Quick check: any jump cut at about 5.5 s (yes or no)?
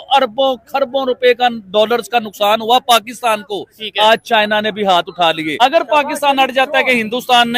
yes